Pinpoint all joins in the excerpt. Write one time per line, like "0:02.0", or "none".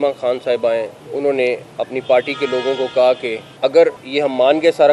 0:01.0
0:01.7
0:03.4
0:04.0